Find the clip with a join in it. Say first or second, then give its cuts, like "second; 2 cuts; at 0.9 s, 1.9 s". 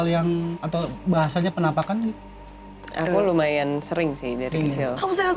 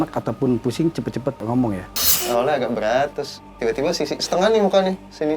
second; 1 cut; at 2.1 s